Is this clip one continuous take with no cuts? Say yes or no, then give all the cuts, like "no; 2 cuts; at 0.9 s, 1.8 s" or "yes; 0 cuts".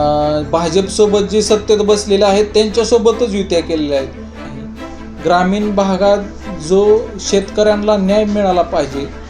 no; 1 cut; at 4.6 s